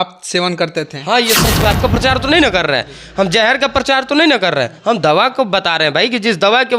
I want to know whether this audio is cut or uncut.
cut